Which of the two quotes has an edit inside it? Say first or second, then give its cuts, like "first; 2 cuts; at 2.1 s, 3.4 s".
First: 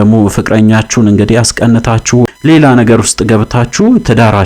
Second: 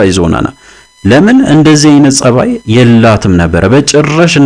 first; 1 cut; at 2.2 s